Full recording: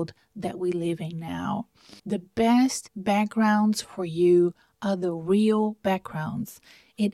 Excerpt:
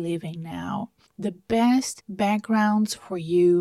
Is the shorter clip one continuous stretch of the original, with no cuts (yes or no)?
no